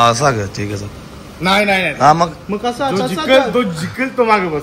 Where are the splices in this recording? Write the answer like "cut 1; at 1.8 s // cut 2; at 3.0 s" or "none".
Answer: none